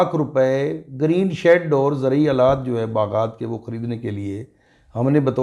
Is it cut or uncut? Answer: uncut